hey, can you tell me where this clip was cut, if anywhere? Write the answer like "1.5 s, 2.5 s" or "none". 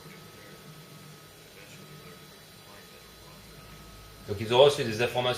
3.0 s